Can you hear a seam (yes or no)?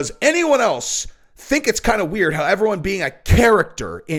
no